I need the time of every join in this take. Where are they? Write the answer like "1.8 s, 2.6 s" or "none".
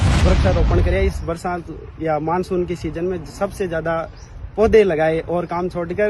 none